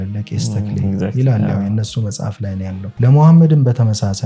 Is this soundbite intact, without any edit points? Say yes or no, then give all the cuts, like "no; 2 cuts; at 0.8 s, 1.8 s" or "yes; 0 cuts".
no; 1 cut; at 2.9 s